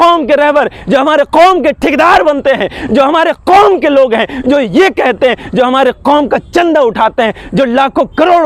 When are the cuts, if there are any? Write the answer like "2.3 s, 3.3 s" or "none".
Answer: none